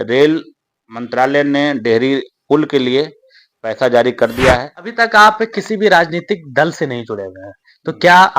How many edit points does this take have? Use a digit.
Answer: 1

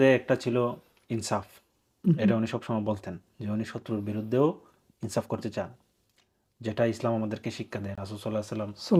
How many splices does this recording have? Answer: 0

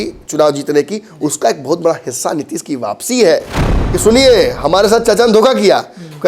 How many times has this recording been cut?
1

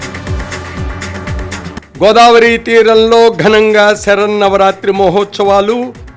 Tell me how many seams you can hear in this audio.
1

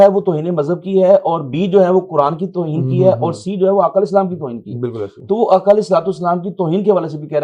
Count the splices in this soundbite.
0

